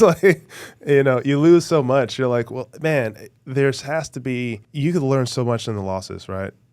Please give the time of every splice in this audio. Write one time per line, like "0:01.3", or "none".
0:04.7